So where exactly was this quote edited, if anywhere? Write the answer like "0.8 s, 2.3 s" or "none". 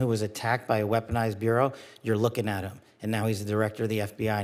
none